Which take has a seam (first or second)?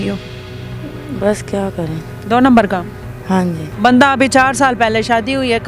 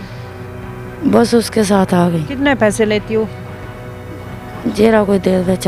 first